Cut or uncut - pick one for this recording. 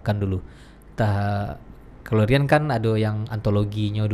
uncut